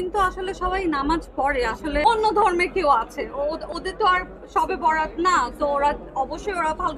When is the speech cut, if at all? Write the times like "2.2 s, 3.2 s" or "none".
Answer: 2.0 s